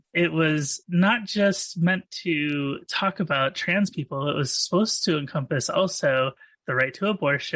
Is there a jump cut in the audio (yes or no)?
no